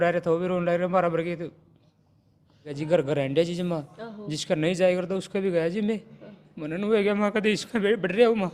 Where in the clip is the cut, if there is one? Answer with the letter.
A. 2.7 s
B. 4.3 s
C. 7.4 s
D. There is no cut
A